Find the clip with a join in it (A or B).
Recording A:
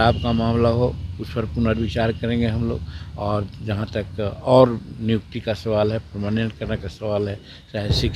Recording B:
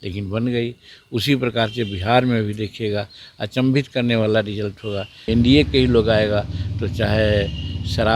B